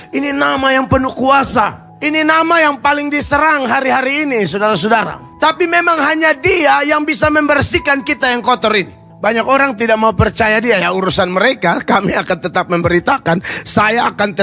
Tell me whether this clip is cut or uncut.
cut